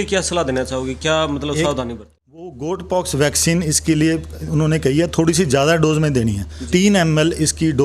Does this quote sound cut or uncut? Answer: cut